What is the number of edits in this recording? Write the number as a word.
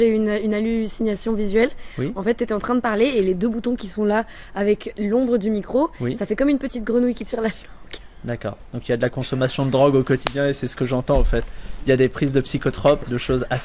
zero